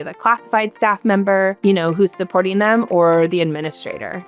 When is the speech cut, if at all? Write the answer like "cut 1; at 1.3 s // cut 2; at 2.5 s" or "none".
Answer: none